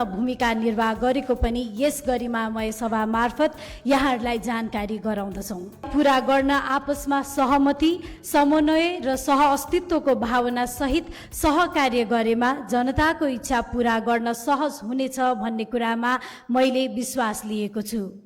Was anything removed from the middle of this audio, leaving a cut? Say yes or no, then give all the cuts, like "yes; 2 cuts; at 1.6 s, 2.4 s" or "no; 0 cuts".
yes; 1 cut; at 5.9 s